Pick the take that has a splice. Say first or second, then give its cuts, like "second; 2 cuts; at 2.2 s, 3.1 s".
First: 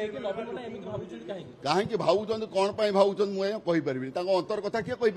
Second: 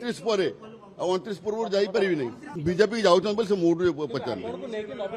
second; 1 cut; at 2.4 s